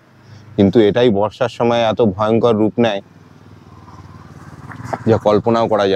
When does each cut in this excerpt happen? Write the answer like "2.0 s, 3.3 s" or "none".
none